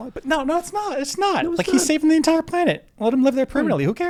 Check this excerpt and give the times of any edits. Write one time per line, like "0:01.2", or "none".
none